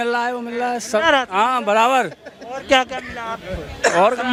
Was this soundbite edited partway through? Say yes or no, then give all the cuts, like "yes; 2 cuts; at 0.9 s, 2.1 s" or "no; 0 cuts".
no; 0 cuts